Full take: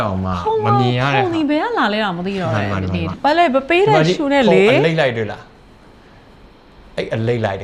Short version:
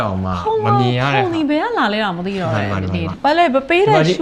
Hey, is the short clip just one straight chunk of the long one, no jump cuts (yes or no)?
yes